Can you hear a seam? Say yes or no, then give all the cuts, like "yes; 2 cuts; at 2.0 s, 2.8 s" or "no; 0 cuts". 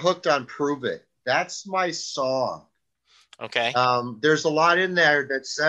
no; 0 cuts